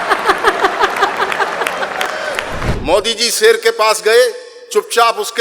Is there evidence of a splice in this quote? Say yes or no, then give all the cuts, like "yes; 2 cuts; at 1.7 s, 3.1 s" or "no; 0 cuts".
yes; 1 cut; at 2.7 s